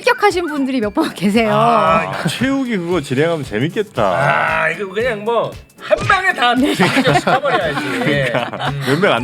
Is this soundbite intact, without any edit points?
no; 1 cut; at 2.1 s

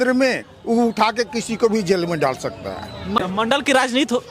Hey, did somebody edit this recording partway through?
yes; 1 cut; at 3.2 s

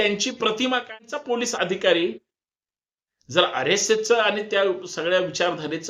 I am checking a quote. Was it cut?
yes; 1 cut; at 0.9 s

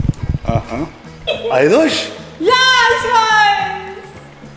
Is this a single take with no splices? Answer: no; 1 cut; at 1.3 s

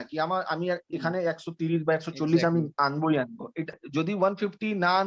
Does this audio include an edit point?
yes; 1 cut; at 3.7 s

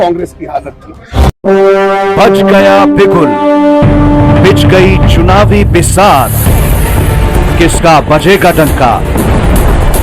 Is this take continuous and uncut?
no; 1 cut; at 1.2 s

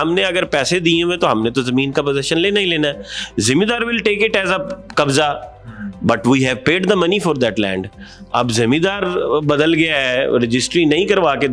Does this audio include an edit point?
no; 0 cuts

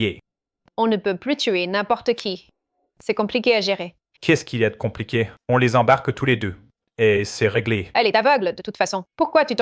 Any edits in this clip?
no; 0 cuts

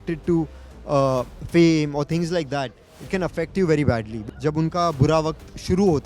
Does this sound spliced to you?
yes; 1 cut; at 4.2 s

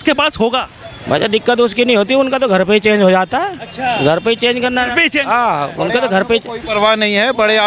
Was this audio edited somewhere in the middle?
no; 0 cuts

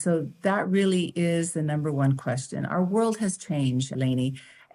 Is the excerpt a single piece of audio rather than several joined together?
yes; 0 cuts

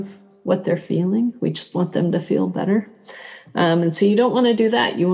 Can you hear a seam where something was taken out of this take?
no; 0 cuts

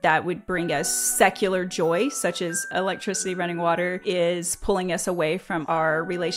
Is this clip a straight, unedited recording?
no; 4 cuts; at 1.0 s, 2.7 s, 4.0 s, 5.6 s

